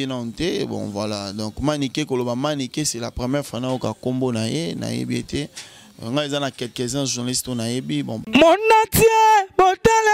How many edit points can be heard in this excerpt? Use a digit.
1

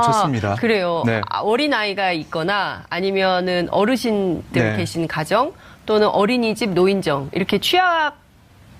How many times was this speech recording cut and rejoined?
0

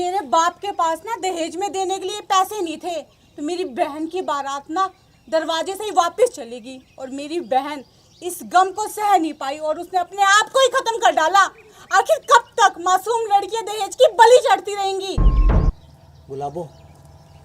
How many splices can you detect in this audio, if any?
1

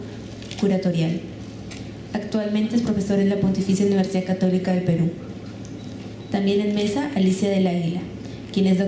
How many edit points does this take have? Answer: 1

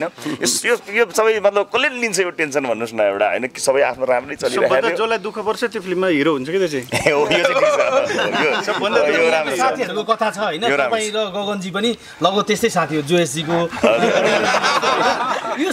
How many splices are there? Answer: 0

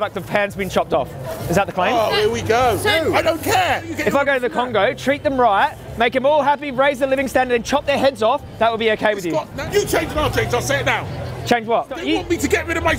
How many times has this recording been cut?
3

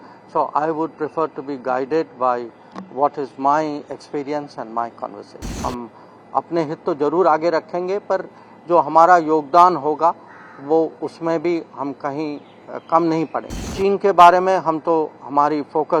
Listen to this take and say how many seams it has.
2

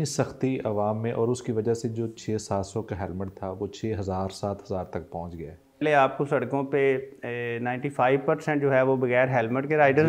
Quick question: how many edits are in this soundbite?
1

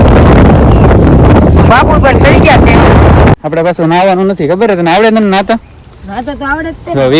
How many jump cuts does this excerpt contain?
1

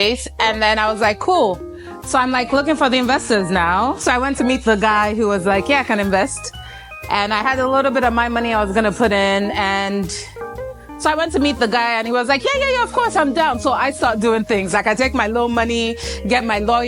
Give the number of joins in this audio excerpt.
0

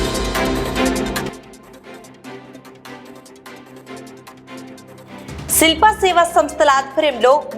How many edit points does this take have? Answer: 1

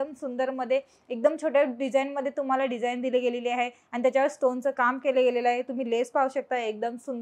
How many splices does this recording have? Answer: 0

